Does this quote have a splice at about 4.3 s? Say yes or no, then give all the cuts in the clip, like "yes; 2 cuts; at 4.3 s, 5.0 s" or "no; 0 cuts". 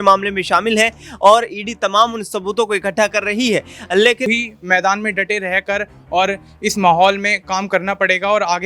yes; 1 cut; at 4.3 s